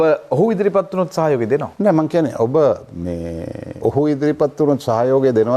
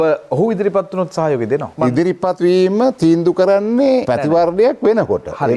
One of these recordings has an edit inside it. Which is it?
second; 1 cut; at 1.8 s

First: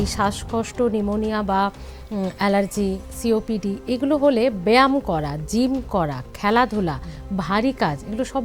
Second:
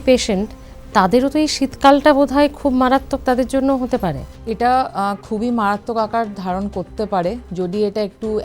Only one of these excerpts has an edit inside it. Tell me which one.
second; 1 cut; at 4.3 s

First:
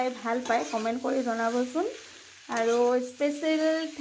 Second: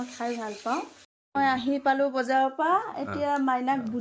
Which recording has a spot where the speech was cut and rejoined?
second; 1 cut; at 1.2 s

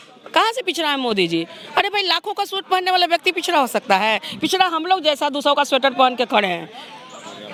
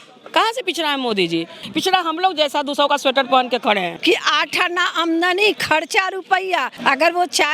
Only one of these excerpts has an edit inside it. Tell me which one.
second; 3 cuts; at 1.6 s, 4.0 s, 6.7 s

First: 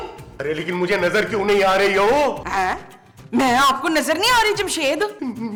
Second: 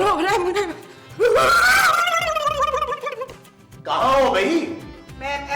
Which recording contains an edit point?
second; 1 cut; at 3.4 s

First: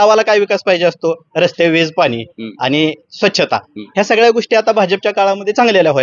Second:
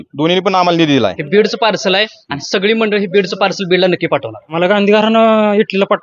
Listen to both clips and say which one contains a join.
second; 2 cuts; at 1.2 s, 4.4 s

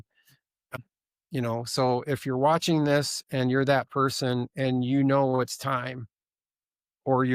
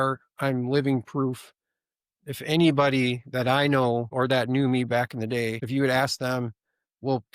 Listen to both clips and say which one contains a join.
second; 2 cuts; at 4.1 s, 5.6 s

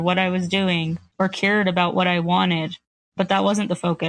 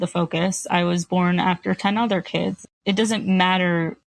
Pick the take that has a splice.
second; 1 cut; at 2.6 s

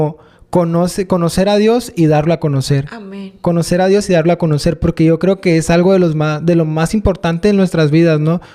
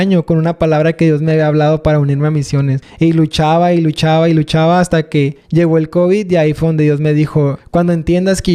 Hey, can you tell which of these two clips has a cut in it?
second; 3 cuts; at 2.8 s, 5.4 s, 7.6 s

